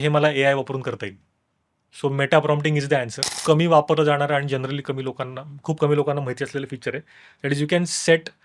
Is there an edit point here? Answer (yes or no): yes